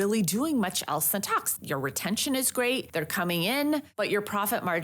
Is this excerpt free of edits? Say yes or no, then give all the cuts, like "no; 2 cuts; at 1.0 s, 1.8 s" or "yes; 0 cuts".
no; 3 cuts; at 1.5 s, 2.9 s, 3.9 s